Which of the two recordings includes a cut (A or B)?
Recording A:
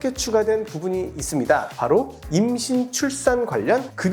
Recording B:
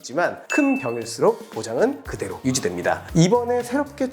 B